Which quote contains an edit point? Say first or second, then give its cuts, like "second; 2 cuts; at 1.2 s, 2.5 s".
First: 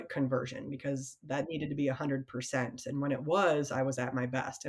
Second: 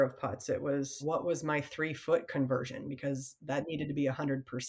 second; 1 cut; at 1.0 s